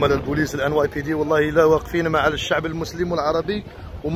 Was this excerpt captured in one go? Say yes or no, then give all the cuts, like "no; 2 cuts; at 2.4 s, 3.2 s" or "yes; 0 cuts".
yes; 0 cuts